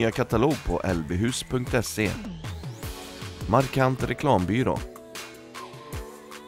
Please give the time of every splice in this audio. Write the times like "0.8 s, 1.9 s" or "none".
4.8 s